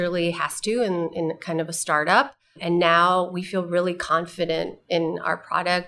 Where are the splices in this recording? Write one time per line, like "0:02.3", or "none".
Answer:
none

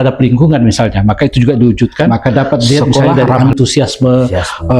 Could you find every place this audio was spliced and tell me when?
0:02.1

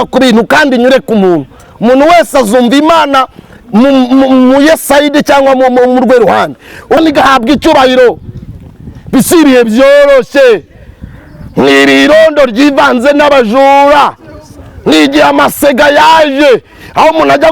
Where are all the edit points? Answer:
0:07.0

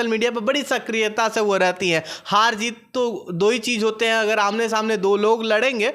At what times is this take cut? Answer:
none

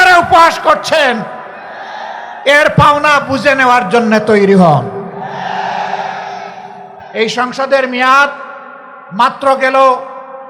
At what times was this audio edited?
0:06.9

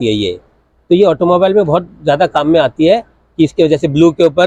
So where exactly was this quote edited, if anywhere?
none

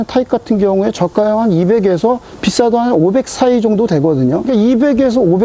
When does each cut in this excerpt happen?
0:04.5

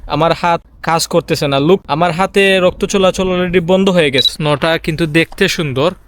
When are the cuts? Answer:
0:04.2

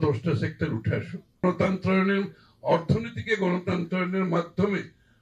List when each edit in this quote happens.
0:01.4

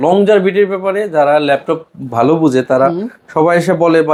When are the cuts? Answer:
none

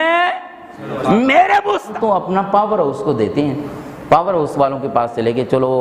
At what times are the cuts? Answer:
0:01.9

